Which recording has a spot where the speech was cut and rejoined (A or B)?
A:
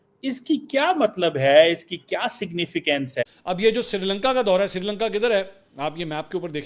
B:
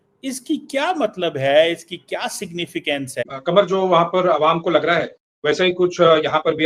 A